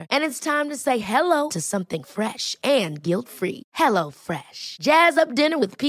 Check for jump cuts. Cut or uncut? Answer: uncut